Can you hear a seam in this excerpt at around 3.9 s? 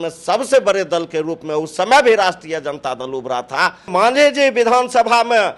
yes; 1 cut; at 3.9 s

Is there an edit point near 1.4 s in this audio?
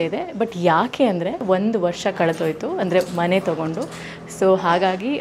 yes; 1 cut; at 1.4 s

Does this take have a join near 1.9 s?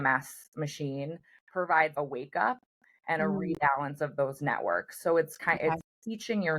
yes; 1 cut; at 1.9 s

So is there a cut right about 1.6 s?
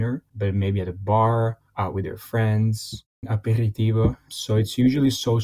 yes; 3 cuts; at 1.6 s, 3.2 s, 4.3 s

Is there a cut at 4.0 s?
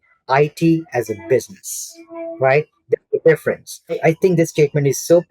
yes; 1 cut; at 4.0 s

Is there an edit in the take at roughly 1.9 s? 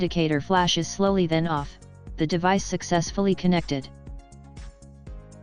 no; 1 cut; at 3.8 s

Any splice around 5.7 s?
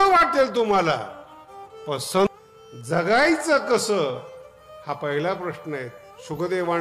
no; 1 cut; at 2.3 s

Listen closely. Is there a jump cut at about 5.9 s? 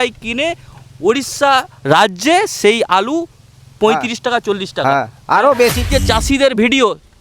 yes; 1 cut; at 5.9 s

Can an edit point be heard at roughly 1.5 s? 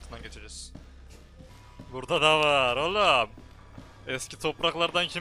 yes; 1 cut; at 1.5 s

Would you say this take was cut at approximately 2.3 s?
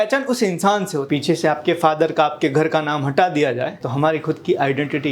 no; 2 cuts; at 1.1 s, 3.9 s

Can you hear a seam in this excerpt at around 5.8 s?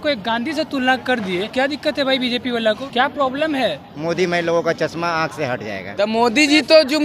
yes; 4 cuts; at 1.5 s, 2.8 s, 3.9 s, 5.8 s

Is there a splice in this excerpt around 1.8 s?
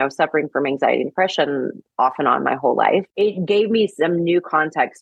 no; 1 cut; at 3.1 s

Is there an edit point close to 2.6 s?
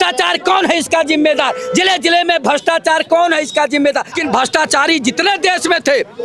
no; 1 cut; at 4.2 s

